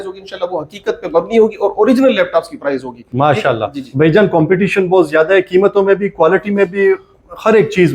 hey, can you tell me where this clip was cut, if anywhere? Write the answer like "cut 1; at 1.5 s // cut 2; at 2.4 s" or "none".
none